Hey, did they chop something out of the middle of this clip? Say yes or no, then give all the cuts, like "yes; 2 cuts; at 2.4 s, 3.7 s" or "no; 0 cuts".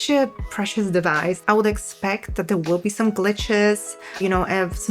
yes; 1 cut; at 1.4 s